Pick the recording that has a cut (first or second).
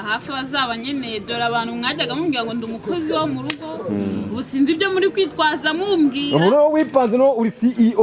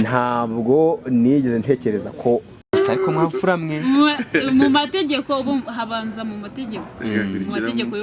second